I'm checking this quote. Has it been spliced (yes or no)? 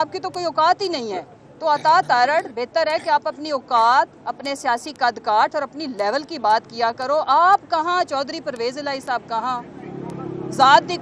no